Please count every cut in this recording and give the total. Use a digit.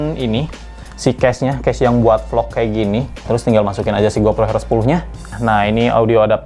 2